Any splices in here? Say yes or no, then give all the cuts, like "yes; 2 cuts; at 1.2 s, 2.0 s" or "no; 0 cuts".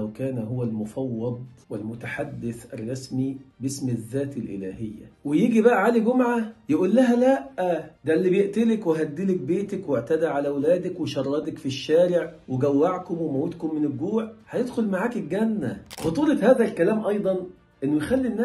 yes; 2 cuts; at 5.1 s, 16.0 s